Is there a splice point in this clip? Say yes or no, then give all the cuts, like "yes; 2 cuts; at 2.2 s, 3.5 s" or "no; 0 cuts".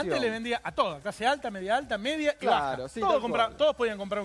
yes; 1 cut; at 2.2 s